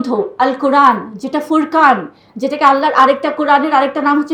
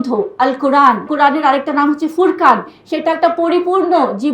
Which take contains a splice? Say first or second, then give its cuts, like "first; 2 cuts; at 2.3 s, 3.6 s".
second; 1 cut; at 1.1 s